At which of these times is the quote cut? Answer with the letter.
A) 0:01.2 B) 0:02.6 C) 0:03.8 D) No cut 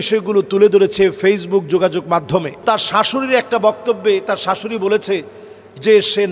B